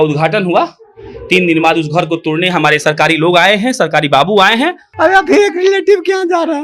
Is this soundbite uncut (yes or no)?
no